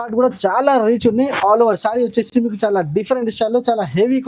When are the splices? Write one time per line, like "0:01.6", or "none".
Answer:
none